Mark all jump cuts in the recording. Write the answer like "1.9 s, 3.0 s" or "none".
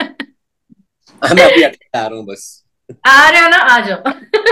none